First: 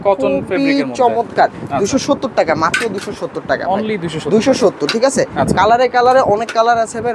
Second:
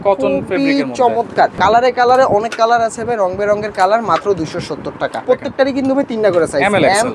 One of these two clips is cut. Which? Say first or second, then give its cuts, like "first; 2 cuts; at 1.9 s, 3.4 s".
second; 2 cuts; at 1.6 s, 5.2 s